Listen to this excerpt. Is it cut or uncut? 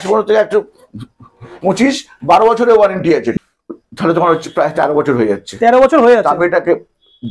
cut